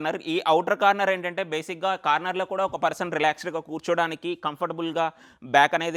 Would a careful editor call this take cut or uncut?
uncut